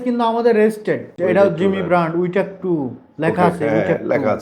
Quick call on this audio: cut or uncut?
cut